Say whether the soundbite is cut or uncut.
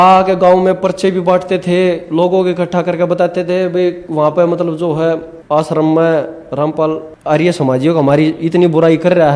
cut